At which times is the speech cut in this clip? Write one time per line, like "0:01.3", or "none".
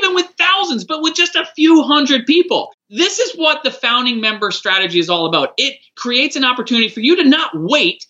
0:02.7
0:05.9